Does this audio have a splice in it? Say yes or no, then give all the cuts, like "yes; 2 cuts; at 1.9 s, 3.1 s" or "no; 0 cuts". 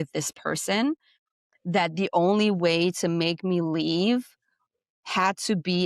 no; 0 cuts